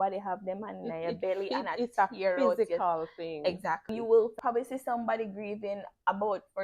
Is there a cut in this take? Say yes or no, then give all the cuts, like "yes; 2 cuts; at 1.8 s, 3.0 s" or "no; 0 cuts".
yes; 1 cut; at 3.9 s